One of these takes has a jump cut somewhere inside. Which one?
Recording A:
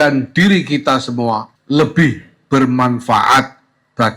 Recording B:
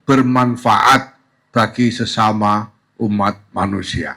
A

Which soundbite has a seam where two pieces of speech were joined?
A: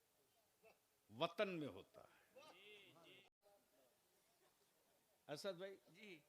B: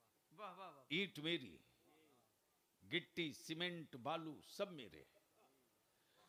A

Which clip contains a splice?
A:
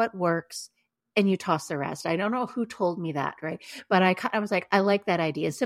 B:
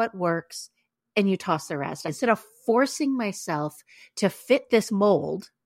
B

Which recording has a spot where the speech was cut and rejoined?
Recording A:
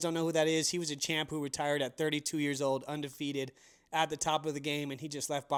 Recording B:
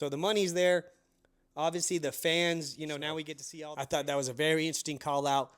B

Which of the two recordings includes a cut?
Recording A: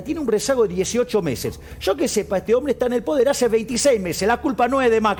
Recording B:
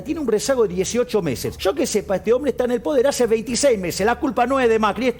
B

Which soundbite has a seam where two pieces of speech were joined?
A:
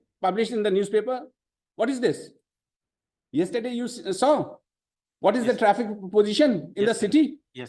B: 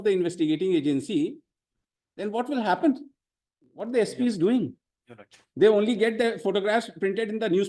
B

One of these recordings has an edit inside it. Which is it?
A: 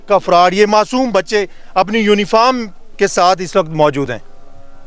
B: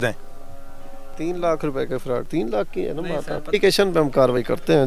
B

